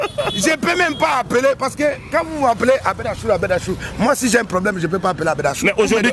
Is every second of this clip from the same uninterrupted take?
yes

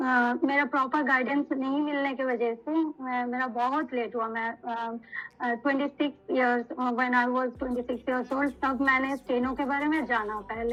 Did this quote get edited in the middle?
no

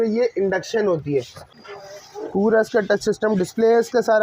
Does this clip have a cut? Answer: yes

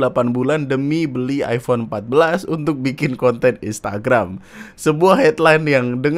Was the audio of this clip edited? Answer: no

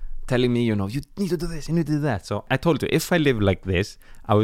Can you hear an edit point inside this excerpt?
yes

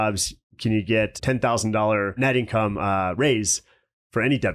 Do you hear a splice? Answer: yes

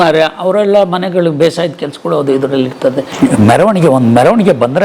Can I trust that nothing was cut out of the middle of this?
no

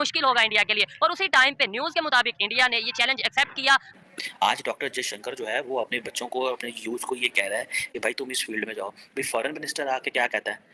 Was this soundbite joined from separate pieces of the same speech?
yes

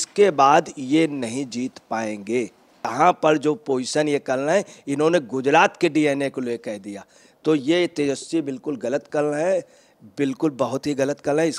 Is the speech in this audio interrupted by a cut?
yes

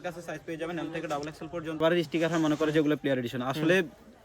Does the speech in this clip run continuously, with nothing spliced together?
no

